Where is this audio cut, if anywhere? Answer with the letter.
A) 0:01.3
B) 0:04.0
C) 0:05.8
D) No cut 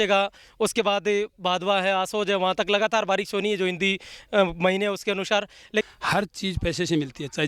C